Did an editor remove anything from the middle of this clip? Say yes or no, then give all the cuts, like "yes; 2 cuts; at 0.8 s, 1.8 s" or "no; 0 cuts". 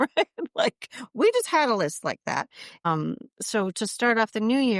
yes; 1 cut; at 2.9 s